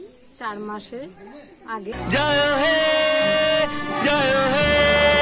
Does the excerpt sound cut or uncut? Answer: cut